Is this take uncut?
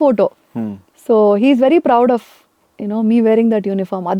yes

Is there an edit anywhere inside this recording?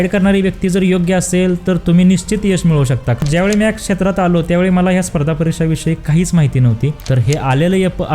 yes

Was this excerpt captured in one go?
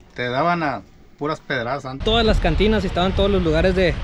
no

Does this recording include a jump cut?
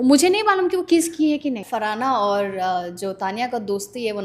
yes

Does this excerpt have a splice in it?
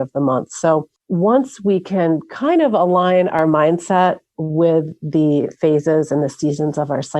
yes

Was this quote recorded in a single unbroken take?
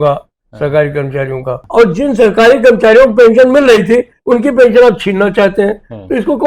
no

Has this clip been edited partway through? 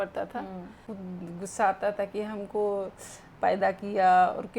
yes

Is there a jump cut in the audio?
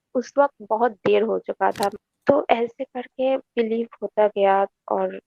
yes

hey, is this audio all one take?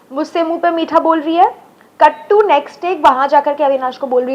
yes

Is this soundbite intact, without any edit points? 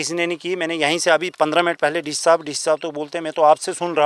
yes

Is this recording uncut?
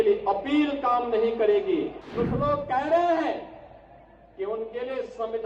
no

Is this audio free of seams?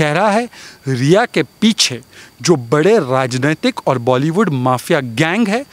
yes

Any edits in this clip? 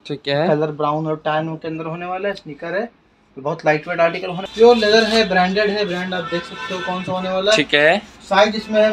yes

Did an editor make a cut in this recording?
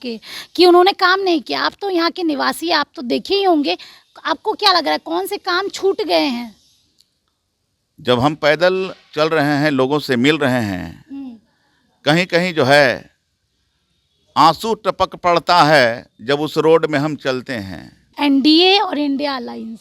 yes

